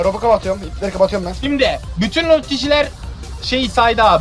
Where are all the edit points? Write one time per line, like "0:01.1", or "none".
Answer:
none